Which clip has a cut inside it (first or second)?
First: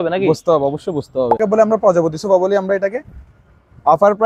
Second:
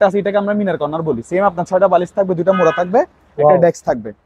first